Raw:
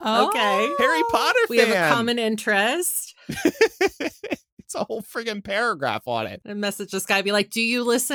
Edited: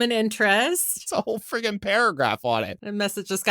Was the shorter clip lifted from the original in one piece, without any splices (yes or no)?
no